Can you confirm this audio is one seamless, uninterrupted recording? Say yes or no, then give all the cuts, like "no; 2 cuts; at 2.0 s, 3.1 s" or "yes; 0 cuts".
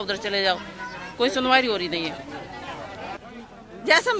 no; 1 cut; at 3.1 s